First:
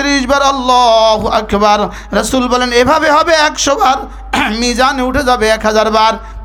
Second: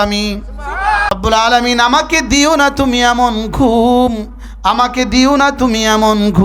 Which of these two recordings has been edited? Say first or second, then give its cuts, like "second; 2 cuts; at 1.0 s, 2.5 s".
second; 1 cut; at 1.1 s